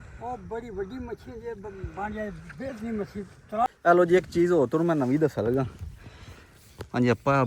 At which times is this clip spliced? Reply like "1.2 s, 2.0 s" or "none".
3.7 s

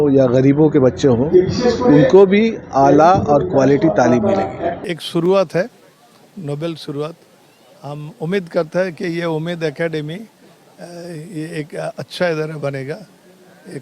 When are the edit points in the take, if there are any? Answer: 4.8 s

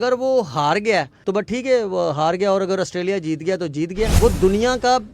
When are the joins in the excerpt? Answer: 1.2 s, 4.1 s

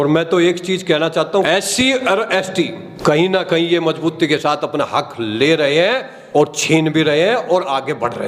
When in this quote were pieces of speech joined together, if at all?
1.5 s

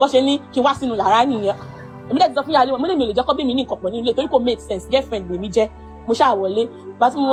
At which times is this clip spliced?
none

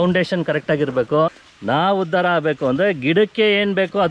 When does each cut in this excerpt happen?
1.5 s

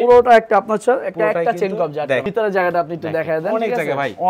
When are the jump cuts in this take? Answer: 2.3 s

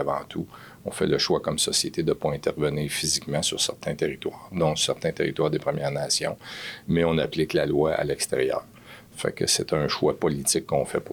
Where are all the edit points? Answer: none

